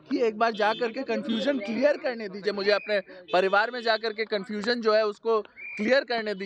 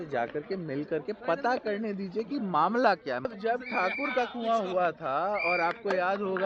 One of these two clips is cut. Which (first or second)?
second